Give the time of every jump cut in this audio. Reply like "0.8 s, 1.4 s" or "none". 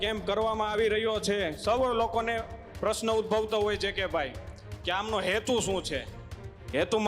none